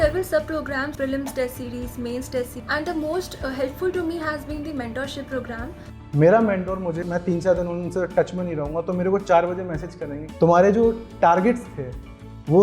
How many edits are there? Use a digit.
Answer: 3